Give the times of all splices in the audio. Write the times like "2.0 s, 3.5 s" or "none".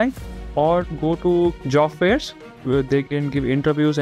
1.6 s, 2.5 s